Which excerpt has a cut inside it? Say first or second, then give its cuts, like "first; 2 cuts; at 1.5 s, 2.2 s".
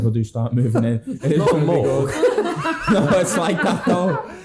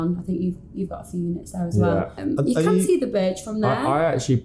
second; 1 cut; at 2.1 s